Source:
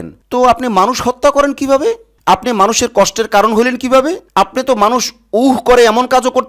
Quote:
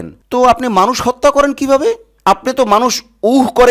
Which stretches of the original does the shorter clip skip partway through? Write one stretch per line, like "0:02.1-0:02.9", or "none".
0:02.1-0:04.2